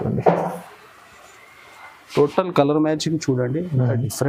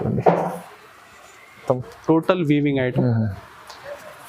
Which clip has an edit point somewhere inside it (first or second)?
second